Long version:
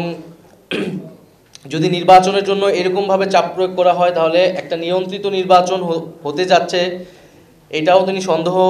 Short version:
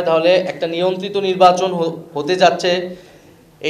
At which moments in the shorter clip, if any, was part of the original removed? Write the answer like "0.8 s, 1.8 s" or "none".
none